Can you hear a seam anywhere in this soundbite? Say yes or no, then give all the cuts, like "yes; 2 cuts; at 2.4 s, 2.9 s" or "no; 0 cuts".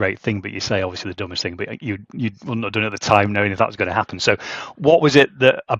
no; 0 cuts